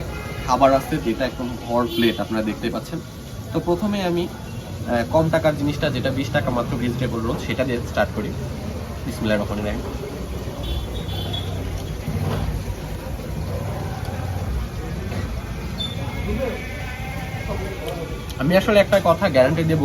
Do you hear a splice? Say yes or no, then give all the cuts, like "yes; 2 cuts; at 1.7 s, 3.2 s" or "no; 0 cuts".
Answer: no; 0 cuts